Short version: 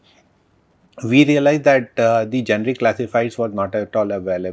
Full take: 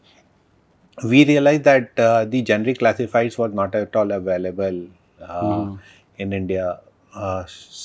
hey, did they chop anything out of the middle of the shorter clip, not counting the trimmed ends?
no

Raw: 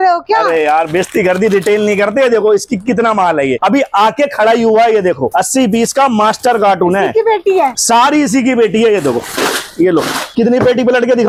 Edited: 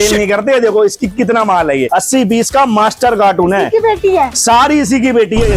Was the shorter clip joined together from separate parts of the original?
yes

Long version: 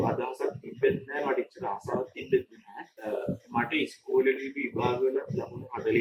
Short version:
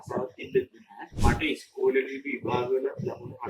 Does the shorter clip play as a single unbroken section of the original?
no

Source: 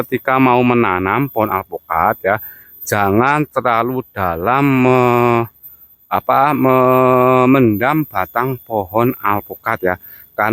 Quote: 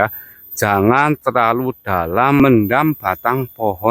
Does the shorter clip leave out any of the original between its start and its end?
yes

